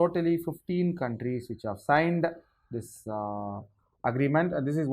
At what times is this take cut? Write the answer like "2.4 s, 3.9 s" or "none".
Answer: none